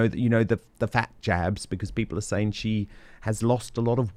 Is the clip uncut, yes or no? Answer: yes